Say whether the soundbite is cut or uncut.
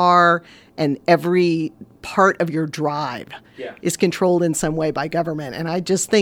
uncut